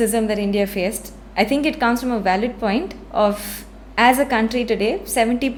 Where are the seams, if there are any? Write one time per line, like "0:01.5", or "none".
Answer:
none